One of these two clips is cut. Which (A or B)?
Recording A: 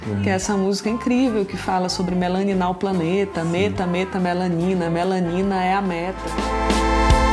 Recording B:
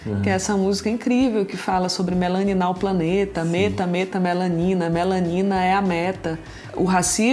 B